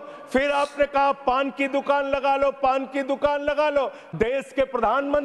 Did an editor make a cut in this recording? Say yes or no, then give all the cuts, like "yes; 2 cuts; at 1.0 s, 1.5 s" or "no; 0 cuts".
yes; 1 cut; at 4.0 s